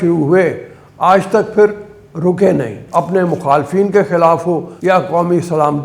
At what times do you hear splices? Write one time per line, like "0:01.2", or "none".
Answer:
0:02.8
0:04.7